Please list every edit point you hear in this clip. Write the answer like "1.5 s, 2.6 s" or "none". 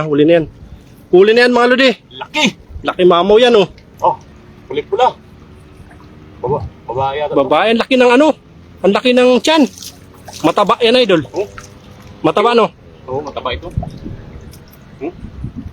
3.8 s